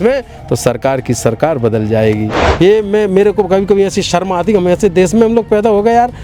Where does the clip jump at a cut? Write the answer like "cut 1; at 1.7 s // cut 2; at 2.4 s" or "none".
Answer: cut 1; at 2.4 s